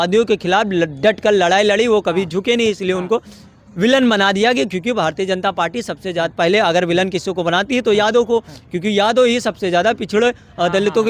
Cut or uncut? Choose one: uncut